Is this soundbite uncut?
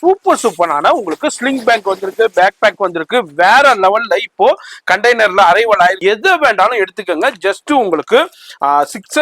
no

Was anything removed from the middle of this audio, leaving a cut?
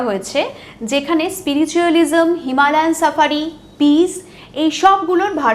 no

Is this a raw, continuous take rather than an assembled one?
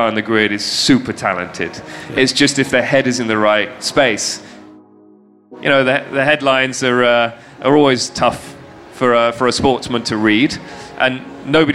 no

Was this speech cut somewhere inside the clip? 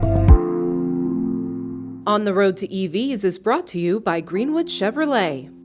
no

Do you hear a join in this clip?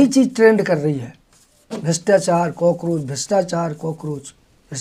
no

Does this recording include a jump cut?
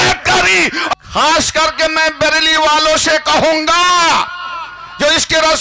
yes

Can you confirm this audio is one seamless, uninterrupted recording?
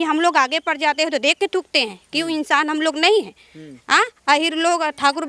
yes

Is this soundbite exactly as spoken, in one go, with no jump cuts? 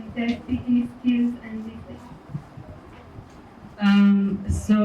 yes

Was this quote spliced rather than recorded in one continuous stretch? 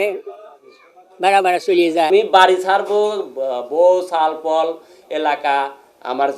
yes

